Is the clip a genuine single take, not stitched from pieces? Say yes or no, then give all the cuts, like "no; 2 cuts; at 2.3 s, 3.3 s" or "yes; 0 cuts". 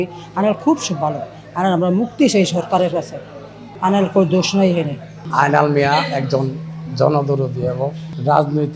yes; 0 cuts